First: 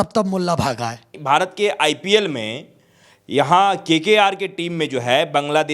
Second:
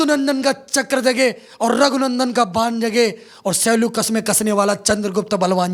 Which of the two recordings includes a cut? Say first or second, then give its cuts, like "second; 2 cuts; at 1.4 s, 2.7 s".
first; 1 cut; at 1.1 s